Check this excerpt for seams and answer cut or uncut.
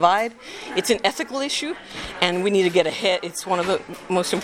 uncut